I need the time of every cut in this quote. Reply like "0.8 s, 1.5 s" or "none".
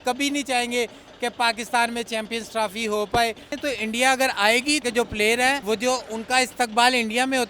3.5 s, 4.8 s, 5.6 s